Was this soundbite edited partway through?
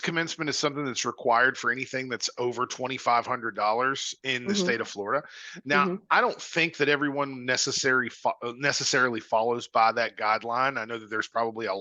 no; 0 cuts

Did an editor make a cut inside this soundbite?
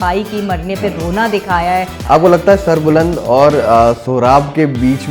yes; 1 cut; at 1.9 s

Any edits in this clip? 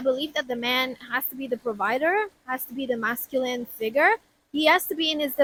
no; 0 cuts

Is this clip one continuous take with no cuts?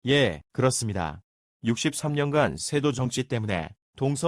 no; 1 cut; at 1.5 s

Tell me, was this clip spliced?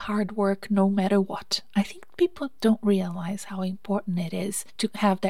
no; 0 cuts

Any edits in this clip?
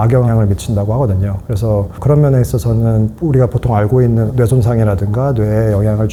no; 0 cuts

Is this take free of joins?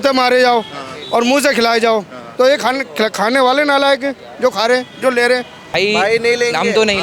no; 1 cut; at 5.6 s

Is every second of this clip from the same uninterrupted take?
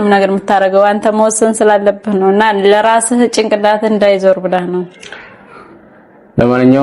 yes; 0 cuts

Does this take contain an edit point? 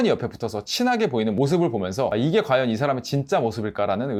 no; 0 cuts

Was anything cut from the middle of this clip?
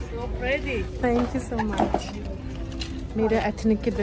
no; 0 cuts

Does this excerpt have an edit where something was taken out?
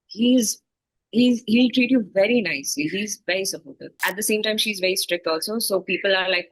yes; 1 cut; at 4.0 s

